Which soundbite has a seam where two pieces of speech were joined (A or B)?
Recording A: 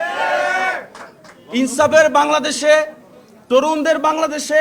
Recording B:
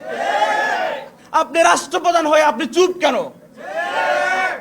B